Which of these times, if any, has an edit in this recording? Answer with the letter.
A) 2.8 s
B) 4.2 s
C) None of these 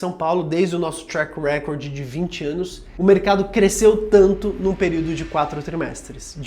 A